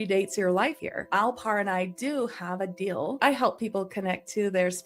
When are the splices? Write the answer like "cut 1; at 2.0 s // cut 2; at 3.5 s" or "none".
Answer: cut 1; at 1.1 s // cut 2; at 3.2 s